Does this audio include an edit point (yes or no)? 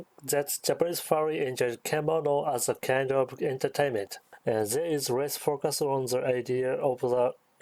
no